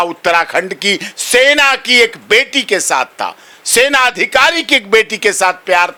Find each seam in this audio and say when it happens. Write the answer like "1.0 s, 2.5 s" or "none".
none

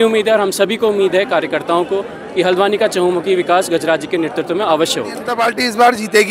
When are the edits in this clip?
5.2 s

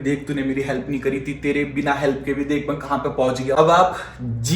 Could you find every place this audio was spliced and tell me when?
3.5 s

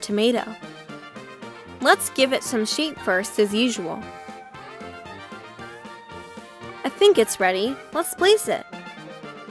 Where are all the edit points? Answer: 4.0 s, 6.8 s, 8.7 s

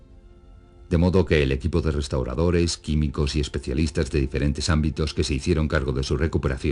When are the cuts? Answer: 1.0 s

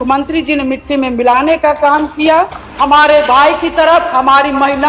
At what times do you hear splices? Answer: 2.6 s

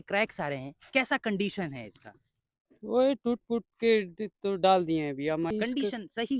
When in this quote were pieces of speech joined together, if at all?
5.5 s

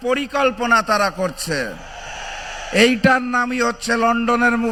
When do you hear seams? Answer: none

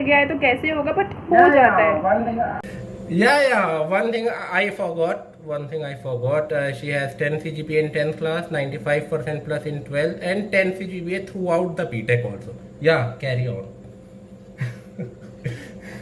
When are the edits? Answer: none

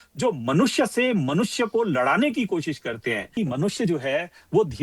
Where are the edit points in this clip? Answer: 3.3 s

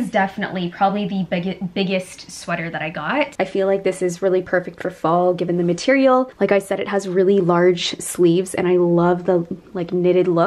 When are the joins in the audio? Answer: 3.3 s, 6.3 s

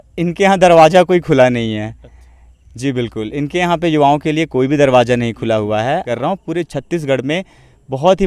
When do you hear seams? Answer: 6.1 s

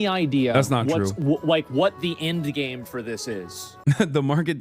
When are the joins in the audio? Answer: 3.7 s

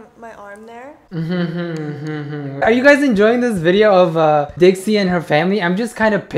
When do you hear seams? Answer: 1.0 s

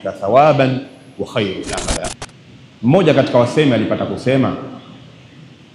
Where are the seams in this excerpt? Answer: 2.1 s

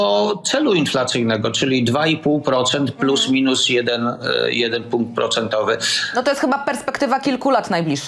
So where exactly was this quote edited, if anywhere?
none

